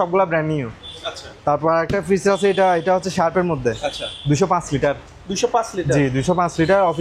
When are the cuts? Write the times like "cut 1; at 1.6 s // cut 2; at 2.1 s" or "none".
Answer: none